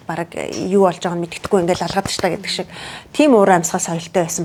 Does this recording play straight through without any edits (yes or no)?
yes